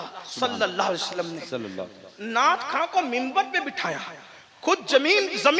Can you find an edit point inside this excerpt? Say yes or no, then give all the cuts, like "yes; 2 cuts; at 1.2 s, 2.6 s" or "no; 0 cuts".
no; 0 cuts